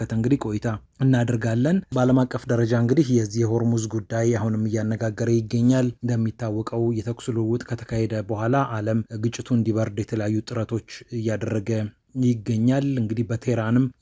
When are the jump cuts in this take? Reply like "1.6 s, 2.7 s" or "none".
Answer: 1.9 s